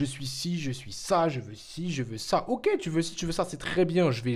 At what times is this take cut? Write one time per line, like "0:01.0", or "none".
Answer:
none